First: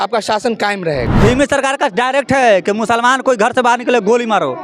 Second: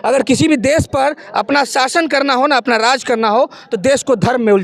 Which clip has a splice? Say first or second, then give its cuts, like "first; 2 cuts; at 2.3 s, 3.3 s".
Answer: first; 1 cut; at 1.1 s